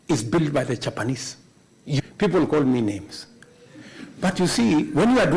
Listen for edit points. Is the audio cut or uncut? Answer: cut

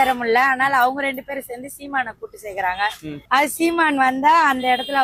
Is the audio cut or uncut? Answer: uncut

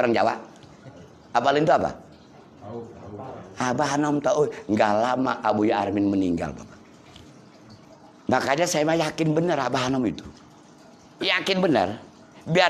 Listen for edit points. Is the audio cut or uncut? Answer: cut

